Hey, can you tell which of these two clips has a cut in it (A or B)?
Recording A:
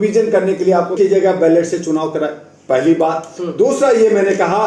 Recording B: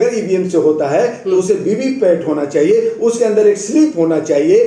A